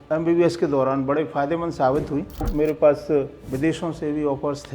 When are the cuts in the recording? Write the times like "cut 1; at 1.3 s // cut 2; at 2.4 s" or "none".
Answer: cut 1; at 2.5 s // cut 2; at 3.4 s